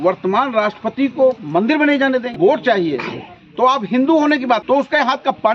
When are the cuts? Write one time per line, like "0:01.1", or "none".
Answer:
0:02.3
0:04.6

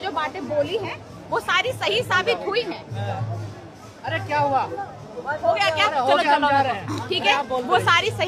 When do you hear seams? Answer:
none

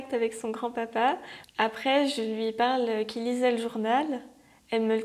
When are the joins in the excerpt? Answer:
0:01.3

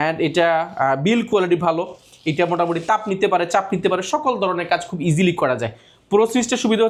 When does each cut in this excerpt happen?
none

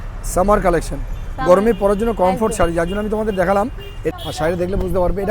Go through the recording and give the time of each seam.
0:04.1

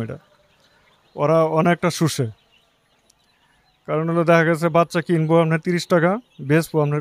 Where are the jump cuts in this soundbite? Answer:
none

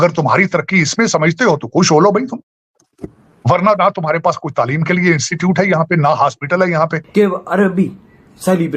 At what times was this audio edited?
0:07.0

